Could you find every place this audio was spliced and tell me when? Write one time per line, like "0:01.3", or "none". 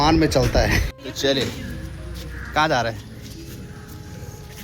0:00.9